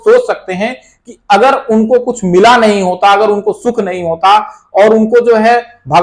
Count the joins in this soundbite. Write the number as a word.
zero